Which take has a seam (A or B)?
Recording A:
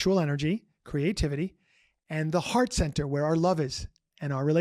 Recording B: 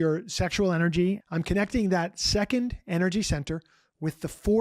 B